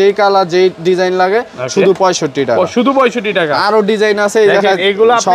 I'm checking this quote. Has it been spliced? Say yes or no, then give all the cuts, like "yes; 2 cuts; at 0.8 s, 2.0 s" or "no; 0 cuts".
no; 0 cuts